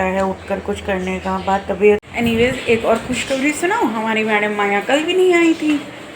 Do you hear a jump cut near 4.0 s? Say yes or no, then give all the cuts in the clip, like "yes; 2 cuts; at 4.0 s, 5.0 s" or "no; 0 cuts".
no; 1 cut; at 2.1 s